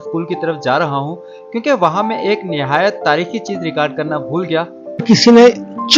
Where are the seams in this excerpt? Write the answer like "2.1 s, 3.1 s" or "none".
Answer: 5.0 s